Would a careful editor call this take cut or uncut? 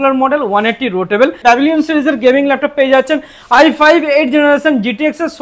cut